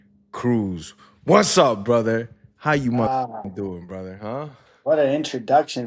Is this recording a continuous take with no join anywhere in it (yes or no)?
yes